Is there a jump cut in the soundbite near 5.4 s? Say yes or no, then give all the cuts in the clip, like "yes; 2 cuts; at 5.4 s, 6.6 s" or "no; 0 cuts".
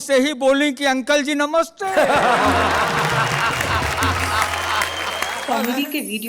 yes; 1 cut; at 5.4 s